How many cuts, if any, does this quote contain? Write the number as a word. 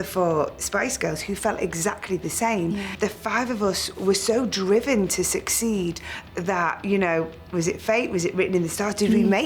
two